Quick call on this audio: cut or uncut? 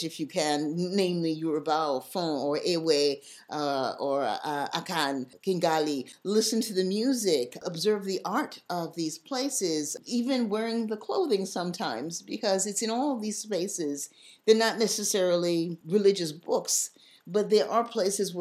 cut